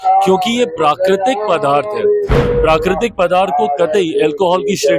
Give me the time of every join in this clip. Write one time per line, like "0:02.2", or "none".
0:02.4